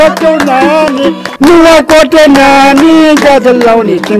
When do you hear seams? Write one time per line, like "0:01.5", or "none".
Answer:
0:01.2